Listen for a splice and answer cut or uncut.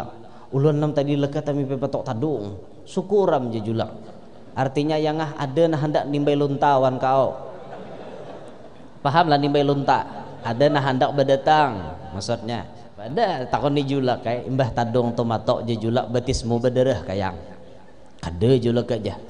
cut